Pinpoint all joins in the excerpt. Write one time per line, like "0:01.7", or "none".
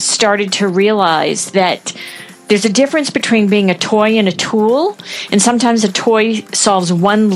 none